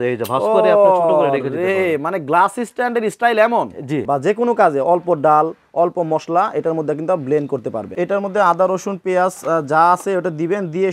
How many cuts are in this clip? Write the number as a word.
two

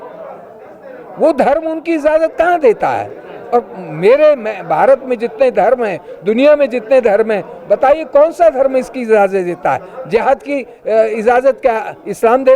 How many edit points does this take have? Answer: zero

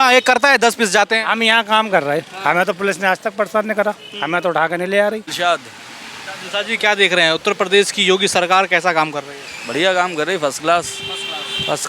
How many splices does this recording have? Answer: one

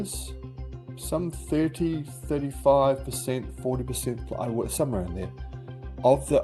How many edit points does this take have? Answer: zero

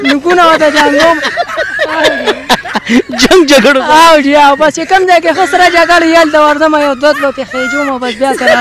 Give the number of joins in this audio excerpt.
one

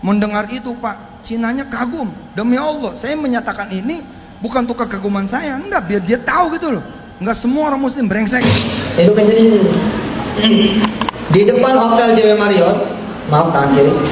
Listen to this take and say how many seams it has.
one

